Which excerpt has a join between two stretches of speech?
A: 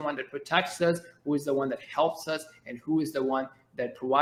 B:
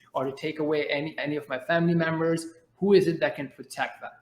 B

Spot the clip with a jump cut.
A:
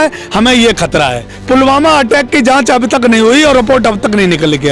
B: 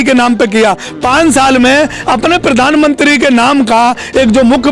A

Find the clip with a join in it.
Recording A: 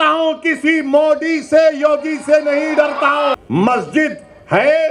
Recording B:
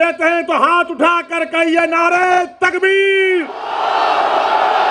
A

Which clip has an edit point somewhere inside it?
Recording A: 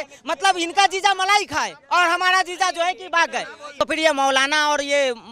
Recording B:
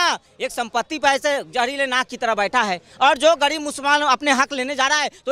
A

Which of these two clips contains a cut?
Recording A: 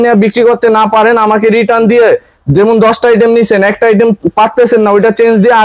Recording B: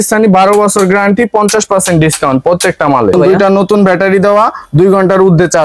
B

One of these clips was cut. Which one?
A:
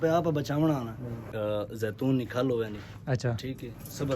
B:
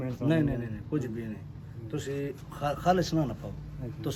A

